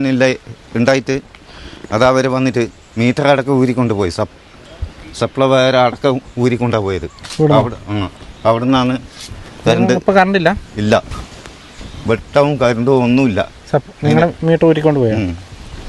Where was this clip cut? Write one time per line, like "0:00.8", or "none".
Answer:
none